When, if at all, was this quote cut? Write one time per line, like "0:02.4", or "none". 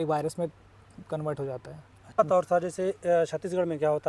0:02.2